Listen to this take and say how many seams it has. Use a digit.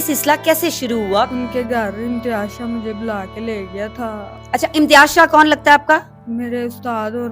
1